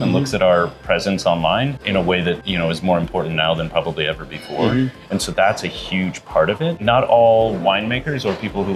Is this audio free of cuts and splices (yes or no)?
no